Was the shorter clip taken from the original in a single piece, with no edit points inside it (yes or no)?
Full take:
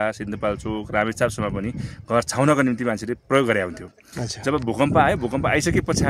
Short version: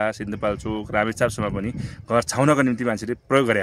yes